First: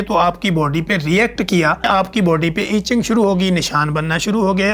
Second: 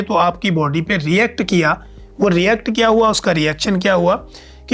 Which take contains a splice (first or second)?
first